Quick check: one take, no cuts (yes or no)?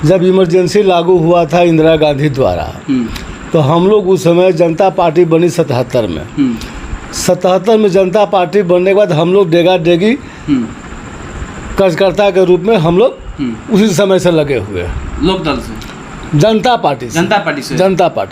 yes